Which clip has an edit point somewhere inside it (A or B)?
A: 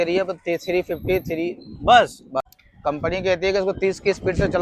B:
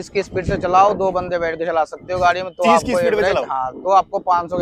A